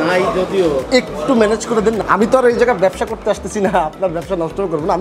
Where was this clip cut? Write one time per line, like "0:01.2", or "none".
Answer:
0:02.0